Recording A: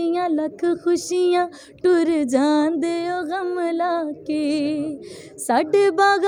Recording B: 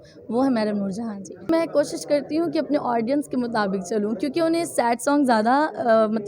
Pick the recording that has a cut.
B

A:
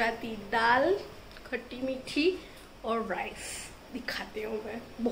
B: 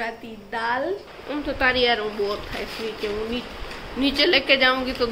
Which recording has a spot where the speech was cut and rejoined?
B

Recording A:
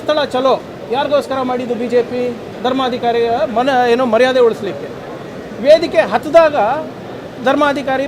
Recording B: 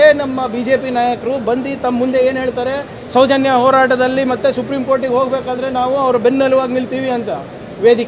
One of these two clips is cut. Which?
A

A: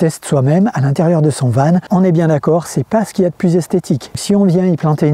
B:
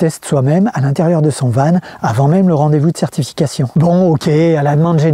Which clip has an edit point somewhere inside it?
A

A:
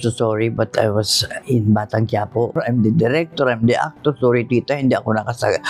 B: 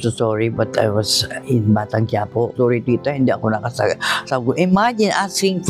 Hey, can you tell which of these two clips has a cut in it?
B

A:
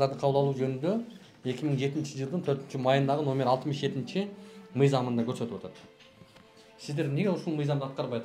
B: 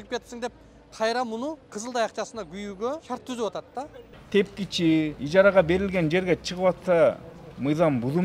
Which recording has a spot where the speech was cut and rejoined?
B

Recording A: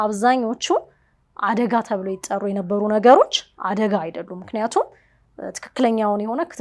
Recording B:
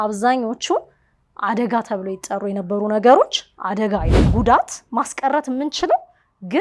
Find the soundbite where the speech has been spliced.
B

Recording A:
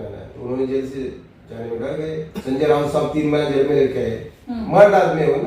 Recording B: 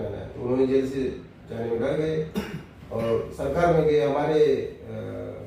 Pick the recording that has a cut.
A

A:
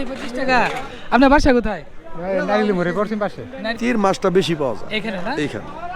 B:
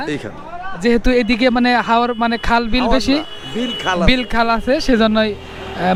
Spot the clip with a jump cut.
A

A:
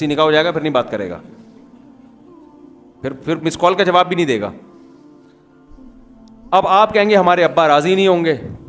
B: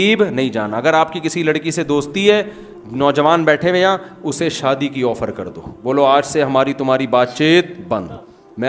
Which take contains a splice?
A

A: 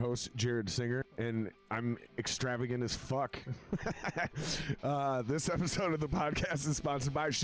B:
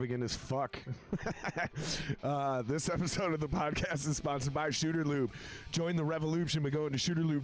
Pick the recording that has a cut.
A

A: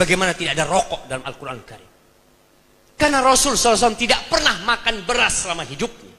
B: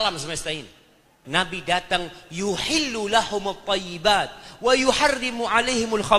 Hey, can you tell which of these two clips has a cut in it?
B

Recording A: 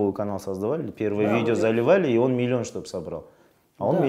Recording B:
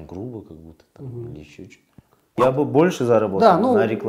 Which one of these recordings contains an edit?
B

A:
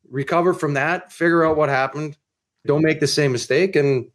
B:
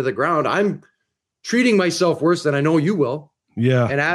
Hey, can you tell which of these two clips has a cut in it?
A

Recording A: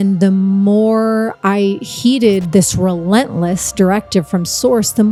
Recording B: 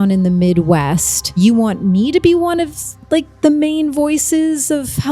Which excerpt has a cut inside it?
B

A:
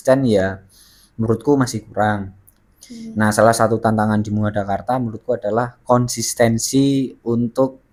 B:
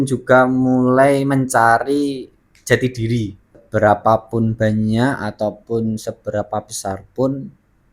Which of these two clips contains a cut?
B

